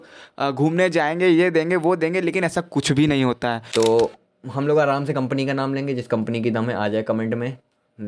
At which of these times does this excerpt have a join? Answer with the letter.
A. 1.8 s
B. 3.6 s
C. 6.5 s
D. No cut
B